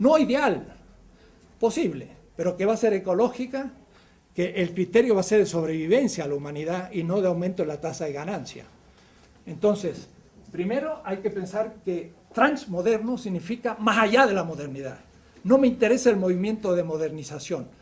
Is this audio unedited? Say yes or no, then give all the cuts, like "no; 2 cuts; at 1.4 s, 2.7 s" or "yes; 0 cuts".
yes; 0 cuts